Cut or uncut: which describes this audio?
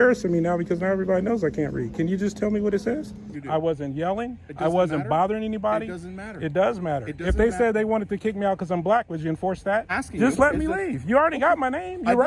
cut